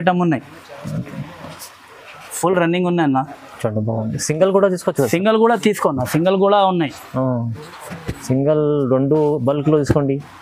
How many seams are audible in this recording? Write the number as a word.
zero